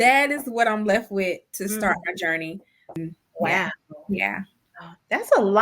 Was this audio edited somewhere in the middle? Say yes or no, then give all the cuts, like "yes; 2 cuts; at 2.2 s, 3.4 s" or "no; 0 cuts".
yes; 1 cut; at 2.7 s